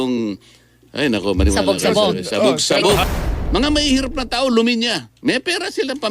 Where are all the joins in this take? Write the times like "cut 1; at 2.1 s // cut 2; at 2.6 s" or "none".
cut 1; at 3.0 s